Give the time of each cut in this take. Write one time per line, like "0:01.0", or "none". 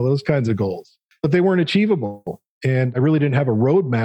0:01.1